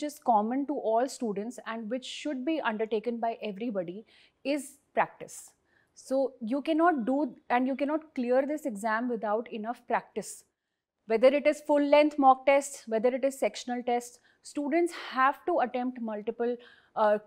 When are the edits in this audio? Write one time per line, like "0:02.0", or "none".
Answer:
none

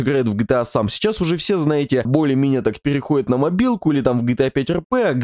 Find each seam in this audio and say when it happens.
none

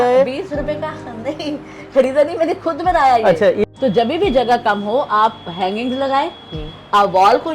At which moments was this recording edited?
0:03.7

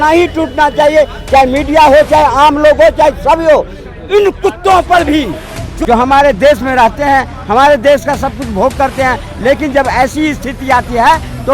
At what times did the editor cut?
0:05.7

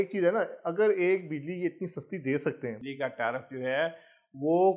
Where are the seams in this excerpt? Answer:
0:02.8

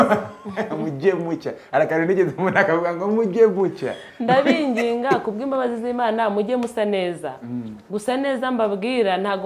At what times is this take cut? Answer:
none

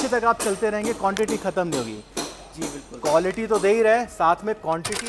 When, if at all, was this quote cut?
none

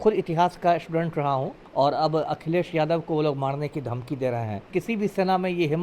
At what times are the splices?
0:01.6
0:04.7

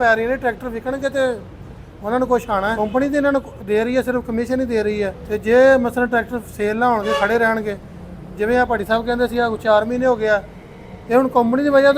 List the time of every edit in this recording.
0:02.8
0:05.2

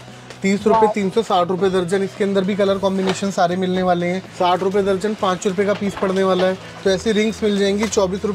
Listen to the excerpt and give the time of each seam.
0:04.2
0:06.7

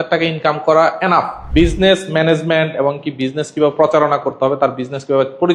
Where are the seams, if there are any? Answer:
0:01.4

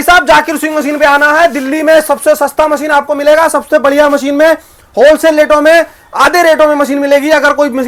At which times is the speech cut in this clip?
none

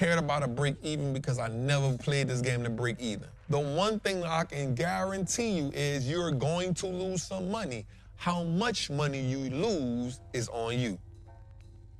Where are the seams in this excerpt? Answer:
0:03.3
0:11.1

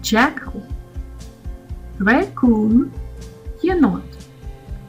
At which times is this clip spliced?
none

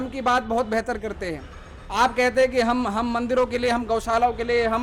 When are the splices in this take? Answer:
none

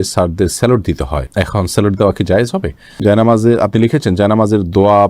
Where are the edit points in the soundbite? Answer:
0:03.0

